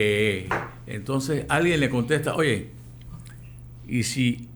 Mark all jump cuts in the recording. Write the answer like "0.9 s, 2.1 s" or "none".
none